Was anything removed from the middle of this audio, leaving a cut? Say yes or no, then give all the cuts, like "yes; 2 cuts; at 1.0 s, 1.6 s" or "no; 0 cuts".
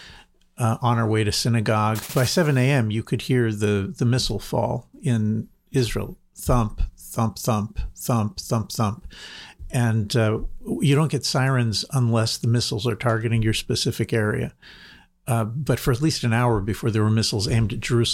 yes; 1 cut; at 2.0 s